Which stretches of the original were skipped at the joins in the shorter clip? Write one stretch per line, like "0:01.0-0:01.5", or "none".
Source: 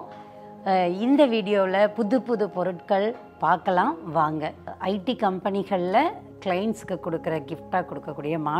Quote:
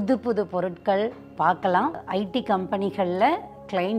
0:04.0-0:04.7